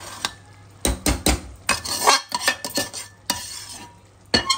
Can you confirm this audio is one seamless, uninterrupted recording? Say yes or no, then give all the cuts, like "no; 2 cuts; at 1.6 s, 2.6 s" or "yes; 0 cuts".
yes; 0 cuts